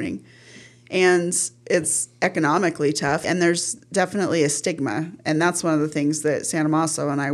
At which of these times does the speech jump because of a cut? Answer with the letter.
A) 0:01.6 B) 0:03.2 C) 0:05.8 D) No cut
B